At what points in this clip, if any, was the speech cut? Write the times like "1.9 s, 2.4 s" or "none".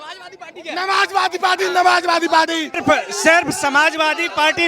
2.8 s